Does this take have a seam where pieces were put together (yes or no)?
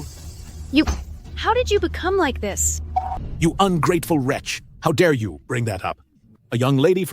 yes